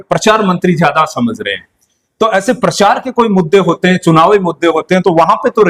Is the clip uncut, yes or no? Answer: yes